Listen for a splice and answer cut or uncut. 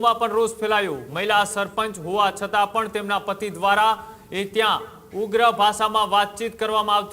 cut